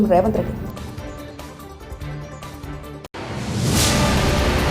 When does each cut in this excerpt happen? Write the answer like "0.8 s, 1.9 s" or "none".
none